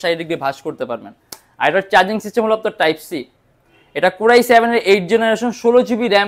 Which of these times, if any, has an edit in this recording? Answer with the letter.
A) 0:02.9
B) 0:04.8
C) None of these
C